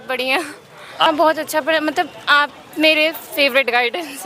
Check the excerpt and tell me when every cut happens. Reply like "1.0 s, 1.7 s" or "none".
1.1 s